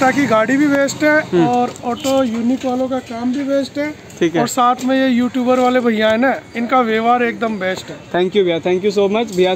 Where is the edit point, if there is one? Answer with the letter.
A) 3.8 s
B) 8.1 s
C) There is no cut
C